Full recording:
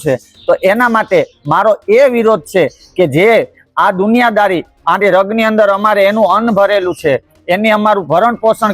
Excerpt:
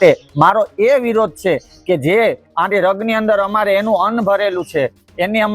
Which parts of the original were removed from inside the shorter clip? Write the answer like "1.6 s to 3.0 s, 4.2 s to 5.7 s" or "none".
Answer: 3.5 s to 4.7 s

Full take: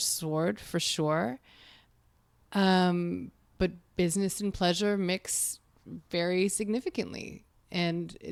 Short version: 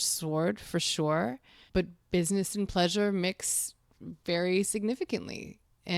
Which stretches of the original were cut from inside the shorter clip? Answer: 1.5 s to 3.4 s

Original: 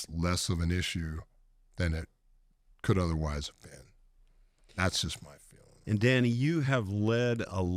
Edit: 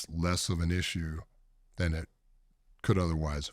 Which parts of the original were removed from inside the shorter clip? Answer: none

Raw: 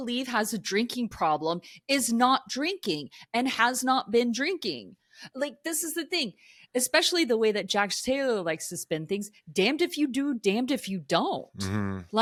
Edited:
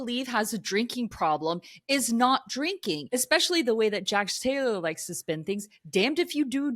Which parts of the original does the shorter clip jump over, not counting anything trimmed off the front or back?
3.0 s to 6.7 s

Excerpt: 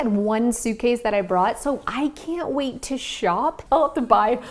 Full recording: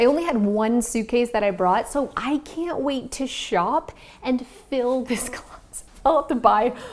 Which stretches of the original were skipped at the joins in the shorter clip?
3.9 s to 5.9 s

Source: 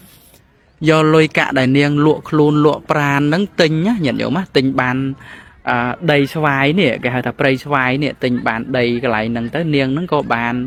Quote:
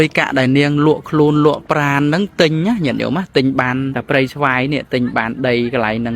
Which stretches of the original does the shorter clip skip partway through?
5.2 s to 7.3 s

